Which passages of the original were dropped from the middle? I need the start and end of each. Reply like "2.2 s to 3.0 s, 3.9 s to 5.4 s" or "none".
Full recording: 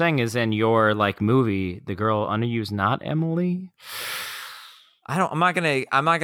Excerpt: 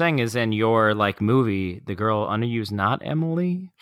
none